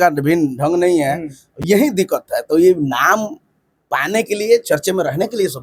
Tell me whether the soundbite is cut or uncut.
uncut